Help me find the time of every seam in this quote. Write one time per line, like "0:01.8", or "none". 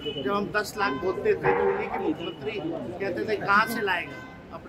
none